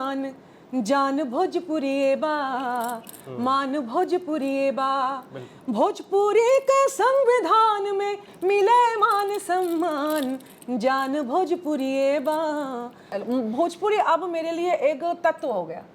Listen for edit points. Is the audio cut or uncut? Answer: cut